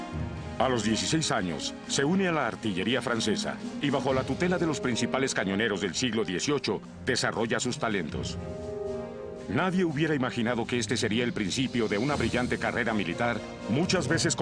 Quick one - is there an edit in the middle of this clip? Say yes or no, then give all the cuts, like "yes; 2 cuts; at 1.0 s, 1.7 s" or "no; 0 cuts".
yes; 1 cut; at 4.6 s